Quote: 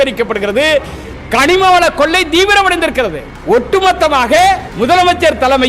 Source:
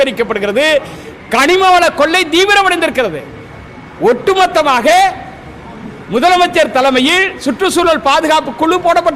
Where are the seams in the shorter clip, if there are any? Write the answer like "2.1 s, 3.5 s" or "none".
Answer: 3.3 s, 4.7 s